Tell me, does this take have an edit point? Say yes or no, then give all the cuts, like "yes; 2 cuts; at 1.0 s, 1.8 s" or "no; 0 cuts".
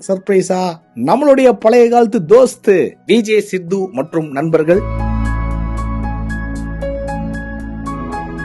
no; 0 cuts